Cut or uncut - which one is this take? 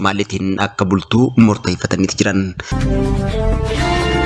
cut